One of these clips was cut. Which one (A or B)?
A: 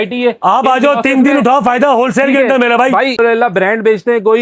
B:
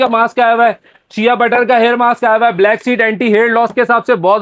A